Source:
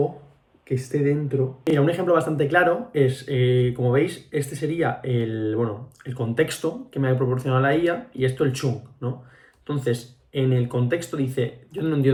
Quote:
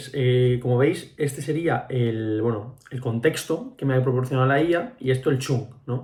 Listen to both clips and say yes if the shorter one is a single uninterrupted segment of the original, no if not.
yes